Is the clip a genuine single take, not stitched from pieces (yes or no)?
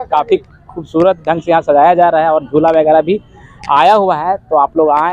yes